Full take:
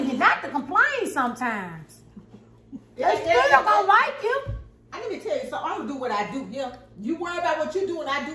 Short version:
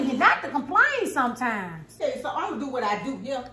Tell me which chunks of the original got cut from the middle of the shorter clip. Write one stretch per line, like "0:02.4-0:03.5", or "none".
0:01.9-0:05.2